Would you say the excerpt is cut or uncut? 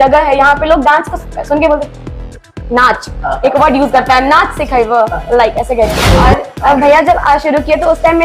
cut